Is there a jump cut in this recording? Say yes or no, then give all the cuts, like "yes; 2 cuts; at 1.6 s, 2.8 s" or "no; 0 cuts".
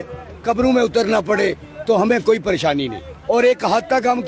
yes; 1 cut; at 3.3 s